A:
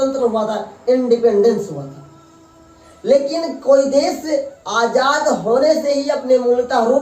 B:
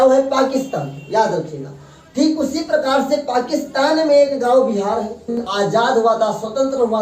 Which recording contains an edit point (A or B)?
B